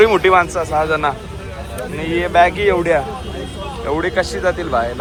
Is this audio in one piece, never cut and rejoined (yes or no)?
yes